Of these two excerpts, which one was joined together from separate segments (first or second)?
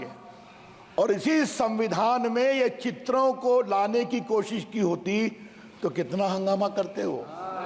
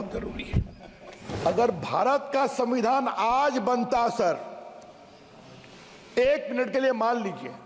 second